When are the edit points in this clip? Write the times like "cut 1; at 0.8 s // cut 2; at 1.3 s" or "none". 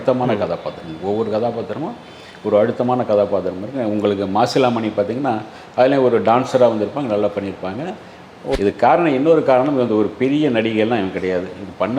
cut 1; at 8.5 s